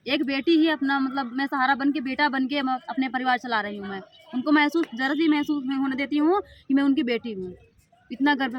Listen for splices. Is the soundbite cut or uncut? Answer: uncut